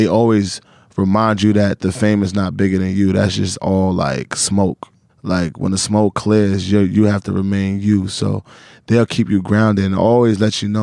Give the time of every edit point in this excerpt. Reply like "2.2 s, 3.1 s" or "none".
5.0 s